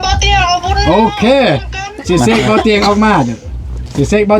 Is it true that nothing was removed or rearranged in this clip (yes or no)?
yes